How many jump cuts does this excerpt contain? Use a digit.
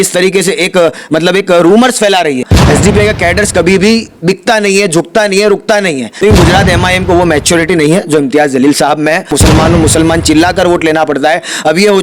3